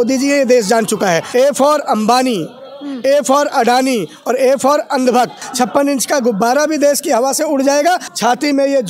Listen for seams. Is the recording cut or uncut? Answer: cut